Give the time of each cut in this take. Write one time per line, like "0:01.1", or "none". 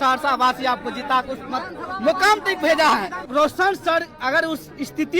0:03.3